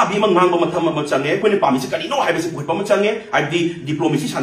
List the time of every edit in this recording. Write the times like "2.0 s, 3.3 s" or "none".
1.4 s